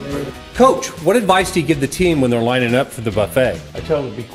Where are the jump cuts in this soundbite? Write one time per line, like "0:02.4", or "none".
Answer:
none